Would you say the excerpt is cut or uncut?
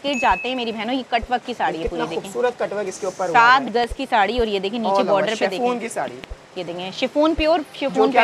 uncut